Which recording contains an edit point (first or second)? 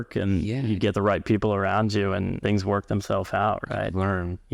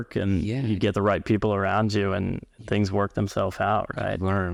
first